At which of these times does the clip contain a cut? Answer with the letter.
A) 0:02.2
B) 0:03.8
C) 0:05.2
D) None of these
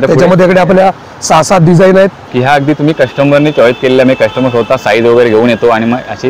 A